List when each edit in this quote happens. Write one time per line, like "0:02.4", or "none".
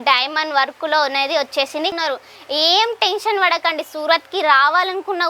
0:02.0